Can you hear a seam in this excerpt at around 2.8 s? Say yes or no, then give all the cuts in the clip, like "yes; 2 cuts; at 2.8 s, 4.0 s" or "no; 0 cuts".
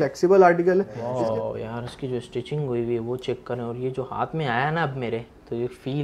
no; 1 cut; at 1.0 s